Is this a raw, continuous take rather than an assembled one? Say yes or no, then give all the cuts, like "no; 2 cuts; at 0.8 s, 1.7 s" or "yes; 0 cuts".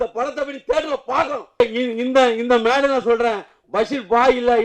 no; 1 cut; at 1.6 s